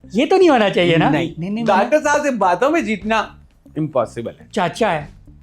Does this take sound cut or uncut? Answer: cut